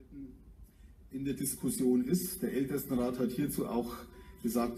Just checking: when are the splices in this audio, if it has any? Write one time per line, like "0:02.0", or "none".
0:01.7